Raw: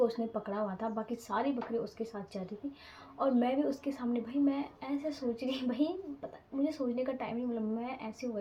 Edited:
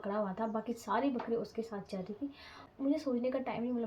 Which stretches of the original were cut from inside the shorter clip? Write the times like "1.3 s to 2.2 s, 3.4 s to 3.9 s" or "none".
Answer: 3.0 s to 6.3 s